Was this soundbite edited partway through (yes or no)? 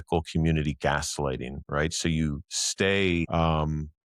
yes